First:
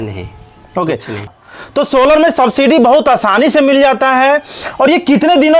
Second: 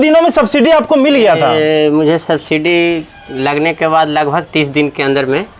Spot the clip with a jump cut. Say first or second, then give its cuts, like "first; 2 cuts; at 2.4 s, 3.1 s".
first; 1 cut; at 1.3 s